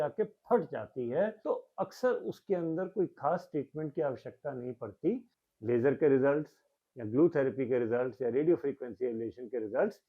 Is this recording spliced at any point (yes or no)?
yes